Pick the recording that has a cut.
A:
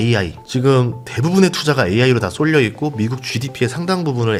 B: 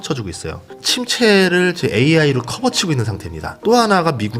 B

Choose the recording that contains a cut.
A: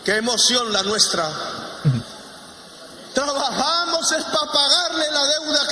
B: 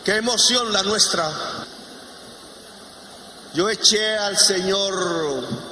B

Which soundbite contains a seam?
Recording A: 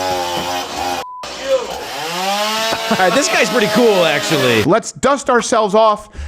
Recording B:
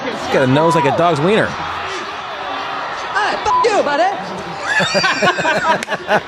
A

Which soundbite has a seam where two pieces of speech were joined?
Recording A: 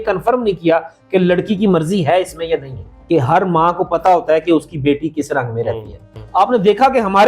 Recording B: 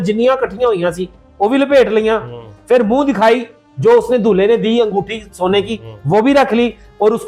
A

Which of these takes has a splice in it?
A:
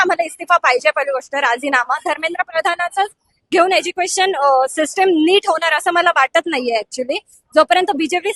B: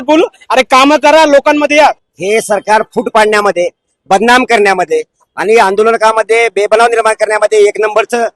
B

